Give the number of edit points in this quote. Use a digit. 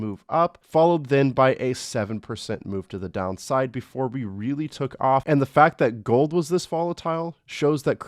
1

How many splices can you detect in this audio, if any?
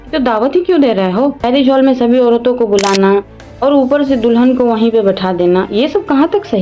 1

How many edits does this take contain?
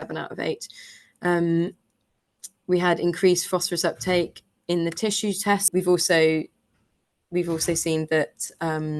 1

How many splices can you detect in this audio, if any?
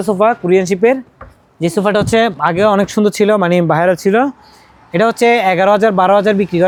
0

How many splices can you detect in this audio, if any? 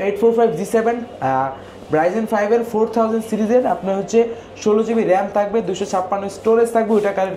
0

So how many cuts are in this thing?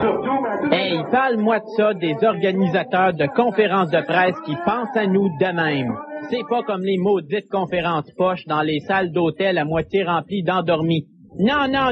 1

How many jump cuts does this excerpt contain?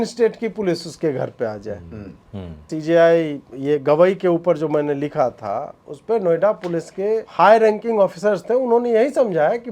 2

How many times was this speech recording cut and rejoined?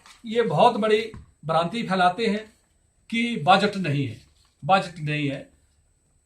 0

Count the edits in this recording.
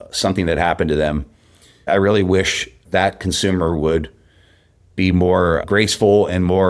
0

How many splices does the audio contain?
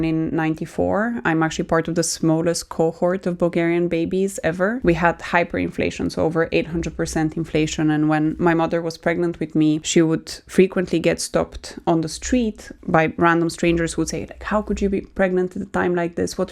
2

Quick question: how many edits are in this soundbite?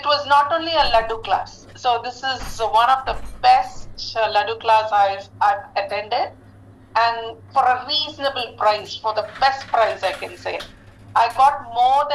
1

